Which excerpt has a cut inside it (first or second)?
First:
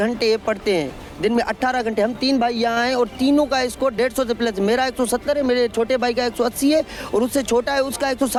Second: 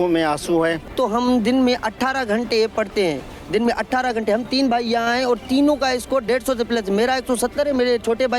second